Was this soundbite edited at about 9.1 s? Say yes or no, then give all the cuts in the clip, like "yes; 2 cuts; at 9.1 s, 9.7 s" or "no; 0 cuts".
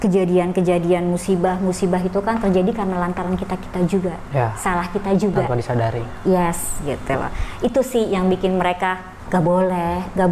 yes; 1 cut; at 9.1 s